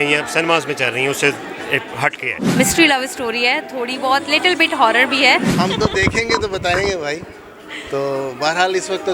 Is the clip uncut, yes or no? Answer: no